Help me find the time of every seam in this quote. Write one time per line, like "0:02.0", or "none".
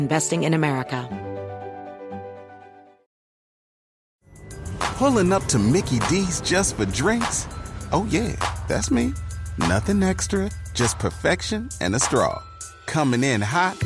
0:01.0